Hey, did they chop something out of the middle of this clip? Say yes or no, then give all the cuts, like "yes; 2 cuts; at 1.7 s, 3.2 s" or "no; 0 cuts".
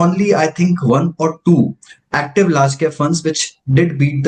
no; 0 cuts